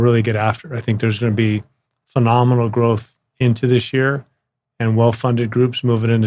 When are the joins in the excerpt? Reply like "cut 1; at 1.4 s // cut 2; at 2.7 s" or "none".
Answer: none